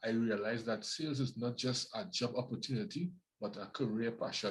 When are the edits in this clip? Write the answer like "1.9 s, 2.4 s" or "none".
none